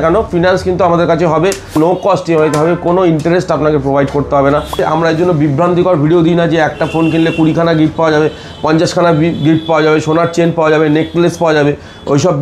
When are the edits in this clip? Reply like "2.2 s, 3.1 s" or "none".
1.7 s, 4.8 s